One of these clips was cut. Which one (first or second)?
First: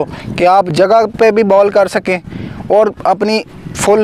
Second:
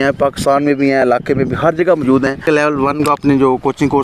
second